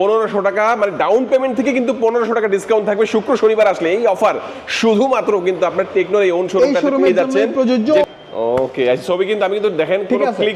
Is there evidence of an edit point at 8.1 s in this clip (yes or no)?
yes